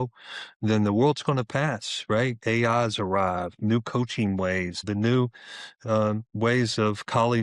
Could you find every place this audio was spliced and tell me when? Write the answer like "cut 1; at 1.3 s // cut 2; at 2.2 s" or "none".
cut 1; at 4.8 s